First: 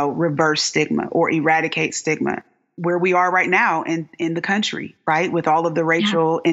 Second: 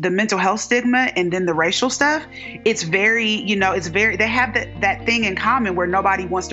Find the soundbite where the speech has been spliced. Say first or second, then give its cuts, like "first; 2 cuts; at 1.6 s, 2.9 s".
first; 1 cut; at 2.6 s